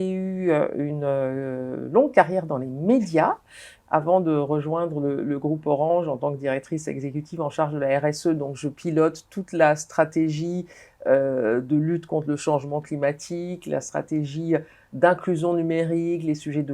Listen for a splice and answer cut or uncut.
uncut